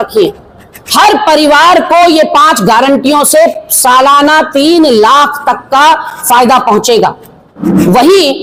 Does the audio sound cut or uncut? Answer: uncut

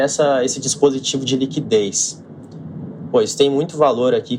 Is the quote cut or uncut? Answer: uncut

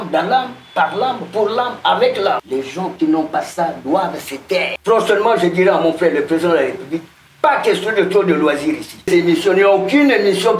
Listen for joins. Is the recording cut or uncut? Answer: cut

